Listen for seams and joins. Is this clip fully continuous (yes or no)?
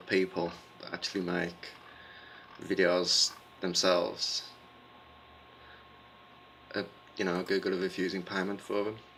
yes